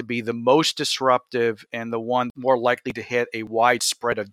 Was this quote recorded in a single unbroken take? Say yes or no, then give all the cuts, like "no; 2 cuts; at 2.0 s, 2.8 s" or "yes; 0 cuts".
no; 1 cut; at 2.3 s